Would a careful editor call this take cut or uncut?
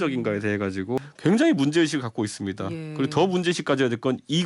cut